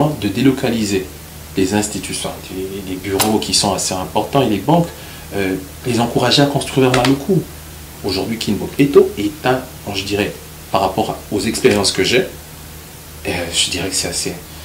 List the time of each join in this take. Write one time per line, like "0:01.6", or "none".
0:07.9